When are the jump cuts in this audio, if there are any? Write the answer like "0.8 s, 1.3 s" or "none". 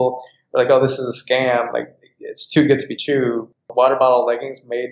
3.6 s